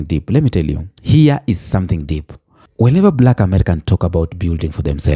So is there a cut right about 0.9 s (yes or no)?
no